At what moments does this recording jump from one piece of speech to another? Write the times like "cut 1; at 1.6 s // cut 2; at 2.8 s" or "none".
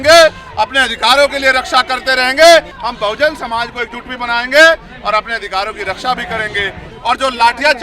cut 1; at 2.8 s // cut 2; at 6.9 s